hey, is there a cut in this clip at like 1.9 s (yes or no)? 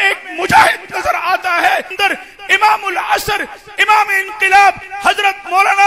yes